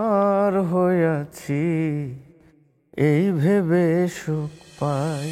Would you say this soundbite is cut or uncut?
uncut